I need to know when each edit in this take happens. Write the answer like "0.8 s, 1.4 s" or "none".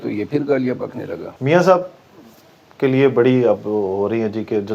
1.3 s